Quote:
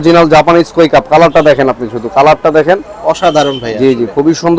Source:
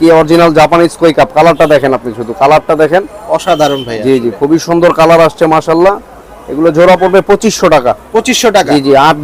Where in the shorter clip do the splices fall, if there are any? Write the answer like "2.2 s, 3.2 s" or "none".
none